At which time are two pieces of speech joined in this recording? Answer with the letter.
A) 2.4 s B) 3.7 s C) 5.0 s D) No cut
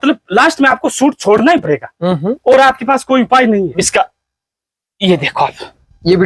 B